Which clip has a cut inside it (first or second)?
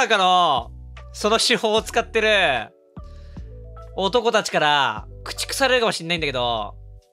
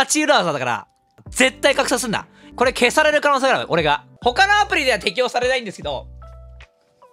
second